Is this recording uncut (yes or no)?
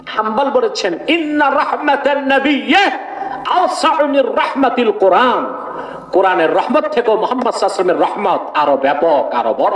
yes